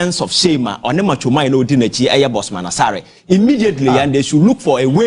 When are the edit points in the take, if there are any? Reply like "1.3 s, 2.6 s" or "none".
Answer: none